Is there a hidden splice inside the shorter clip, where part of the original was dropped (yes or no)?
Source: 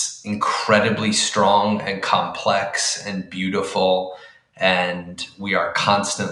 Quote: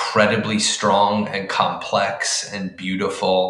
no